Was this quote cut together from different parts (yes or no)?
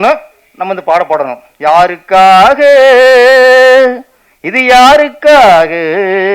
no